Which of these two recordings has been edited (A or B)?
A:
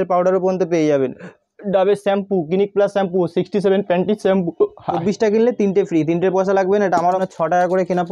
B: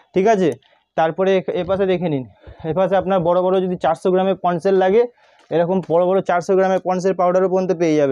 A